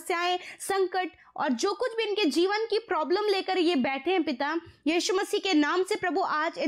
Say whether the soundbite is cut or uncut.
uncut